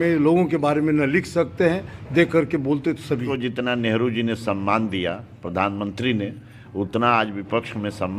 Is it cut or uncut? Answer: cut